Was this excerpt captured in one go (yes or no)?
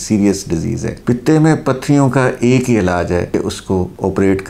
yes